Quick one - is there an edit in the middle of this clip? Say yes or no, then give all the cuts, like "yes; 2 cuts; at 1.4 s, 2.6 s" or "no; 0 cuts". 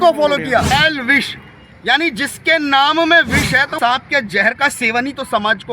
yes; 2 cuts; at 0.7 s, 3.8 s